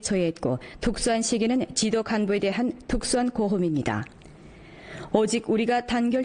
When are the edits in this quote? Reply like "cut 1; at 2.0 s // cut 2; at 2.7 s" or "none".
cut 1; at 4.0 s

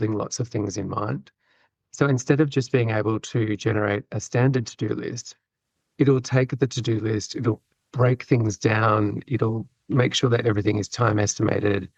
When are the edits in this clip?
none

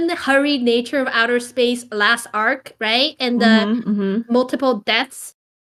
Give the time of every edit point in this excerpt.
none

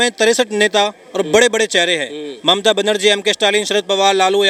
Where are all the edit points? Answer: none

